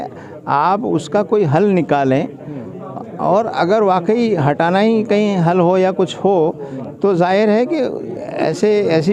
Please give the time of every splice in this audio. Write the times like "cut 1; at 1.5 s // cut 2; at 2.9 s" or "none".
none